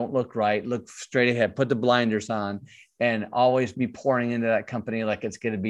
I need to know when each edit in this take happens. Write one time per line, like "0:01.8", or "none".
none